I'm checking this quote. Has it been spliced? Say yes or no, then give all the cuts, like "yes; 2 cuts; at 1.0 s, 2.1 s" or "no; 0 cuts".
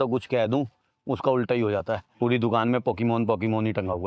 no; 0 cuts